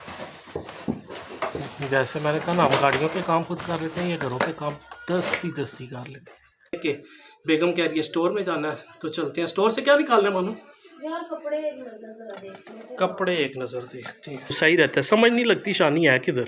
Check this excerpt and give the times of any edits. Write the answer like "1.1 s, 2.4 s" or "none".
6.7 s, 14.6 s

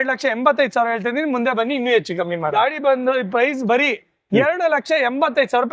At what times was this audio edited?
2.5 s

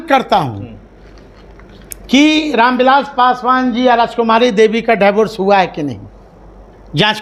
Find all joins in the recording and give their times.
none

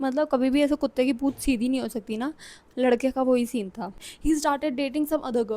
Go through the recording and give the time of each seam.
4.0 s

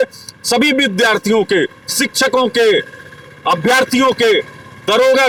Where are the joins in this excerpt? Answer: none

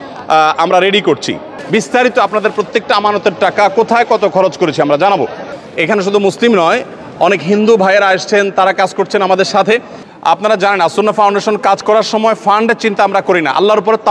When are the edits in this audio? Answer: 1.5 s, 5.5 s, 10.0 s

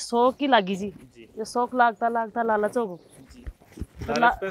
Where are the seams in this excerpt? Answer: none

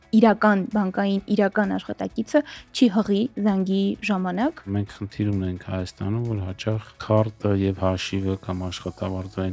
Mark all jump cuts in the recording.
4.7 s, 6.9 s

